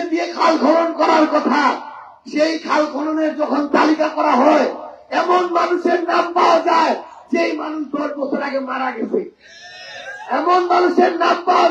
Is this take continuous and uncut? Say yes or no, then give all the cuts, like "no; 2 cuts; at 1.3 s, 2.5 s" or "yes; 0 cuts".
yes; 0 cuts